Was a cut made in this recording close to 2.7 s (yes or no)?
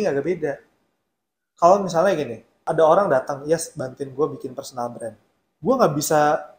yes